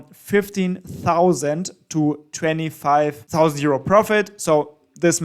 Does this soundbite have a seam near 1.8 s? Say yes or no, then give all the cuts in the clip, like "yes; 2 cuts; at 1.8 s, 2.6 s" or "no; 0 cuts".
no; 1 cut; at 3.2 s